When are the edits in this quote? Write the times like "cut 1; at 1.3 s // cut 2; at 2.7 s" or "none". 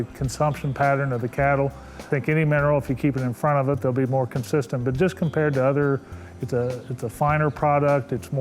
cut 1; at 2.1 s

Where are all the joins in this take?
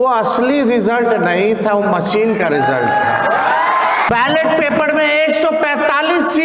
cut 1; at 4.1 s

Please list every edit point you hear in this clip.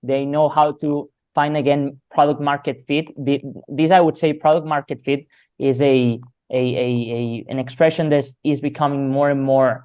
none

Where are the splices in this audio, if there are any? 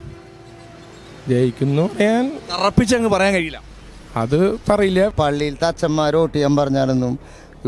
cut 1; at 5.1 s

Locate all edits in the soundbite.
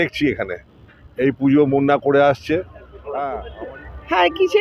cut 1; at 3.3 s

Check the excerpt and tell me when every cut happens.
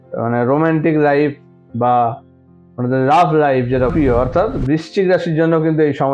cut 1; at 3.9 s

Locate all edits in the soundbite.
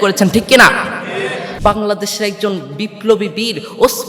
cut 1; at 1.5 s

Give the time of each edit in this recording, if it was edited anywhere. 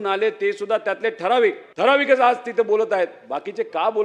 cut 1; at 1.7 s

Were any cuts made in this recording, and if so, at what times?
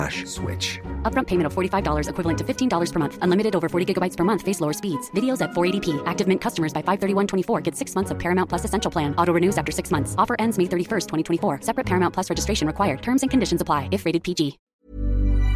cut 1; at 14.6 s

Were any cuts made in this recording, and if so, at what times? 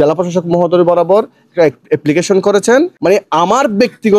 cut 1; at 2.9 s

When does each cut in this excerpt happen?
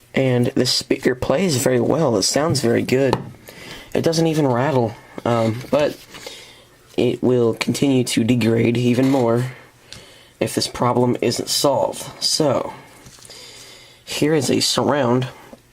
cut 1; at 9.1 s

